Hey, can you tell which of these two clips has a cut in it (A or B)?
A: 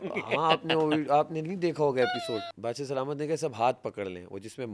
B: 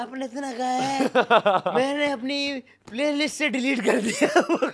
A